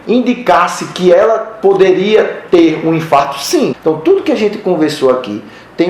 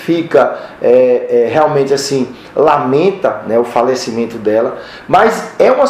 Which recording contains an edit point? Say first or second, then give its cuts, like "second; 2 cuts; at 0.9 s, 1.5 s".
first; 1 cut; at 3.8 s